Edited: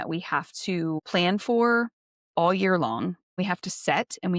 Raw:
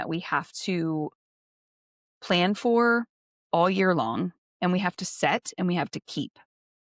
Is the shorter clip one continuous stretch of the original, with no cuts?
no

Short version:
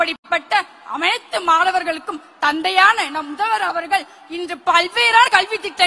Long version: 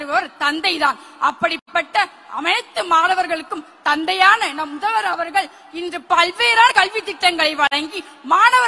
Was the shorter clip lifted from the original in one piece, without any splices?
yes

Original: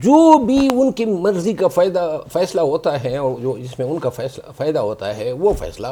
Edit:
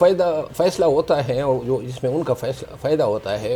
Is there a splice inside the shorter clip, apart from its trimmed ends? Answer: no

